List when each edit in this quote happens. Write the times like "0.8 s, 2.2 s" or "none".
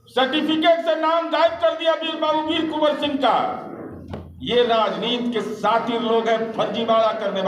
none